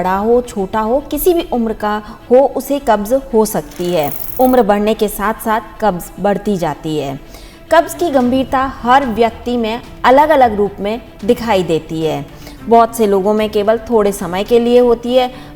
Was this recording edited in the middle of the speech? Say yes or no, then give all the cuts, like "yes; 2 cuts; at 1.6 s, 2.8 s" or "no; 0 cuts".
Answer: yes; 1 cut; at 4.2 s